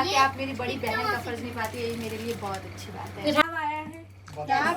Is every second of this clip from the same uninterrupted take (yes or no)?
no